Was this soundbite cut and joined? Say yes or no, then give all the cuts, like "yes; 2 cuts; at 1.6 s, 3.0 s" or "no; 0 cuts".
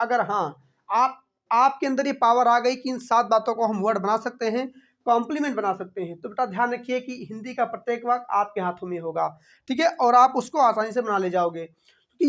no; 0 cuts